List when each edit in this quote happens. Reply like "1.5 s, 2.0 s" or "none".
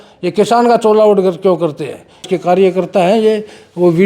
2.3 s